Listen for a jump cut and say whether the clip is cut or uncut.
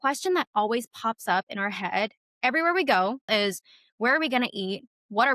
cut